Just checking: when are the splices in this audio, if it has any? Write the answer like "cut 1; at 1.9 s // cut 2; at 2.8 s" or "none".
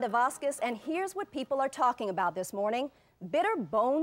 none